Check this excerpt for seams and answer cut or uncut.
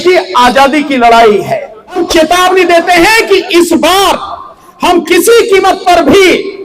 cut